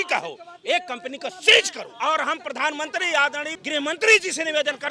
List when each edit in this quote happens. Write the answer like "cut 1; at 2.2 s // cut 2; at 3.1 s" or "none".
cut 1; at 1.9 s // cut 2; at 3.6 s